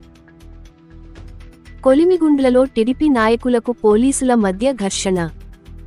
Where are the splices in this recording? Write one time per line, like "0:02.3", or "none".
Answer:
none